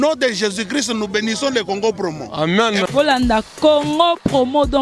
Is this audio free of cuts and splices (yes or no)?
yes